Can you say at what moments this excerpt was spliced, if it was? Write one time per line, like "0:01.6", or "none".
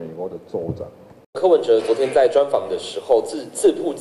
0:01.4